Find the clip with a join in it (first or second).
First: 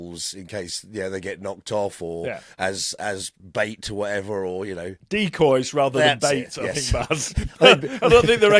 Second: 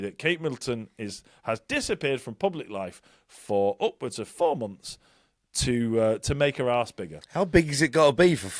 first